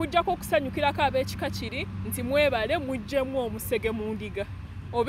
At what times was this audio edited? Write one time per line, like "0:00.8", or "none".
none